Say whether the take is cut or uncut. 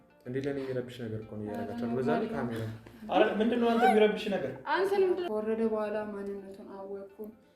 cut